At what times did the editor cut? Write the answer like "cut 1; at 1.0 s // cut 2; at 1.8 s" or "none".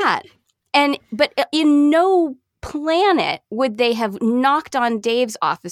none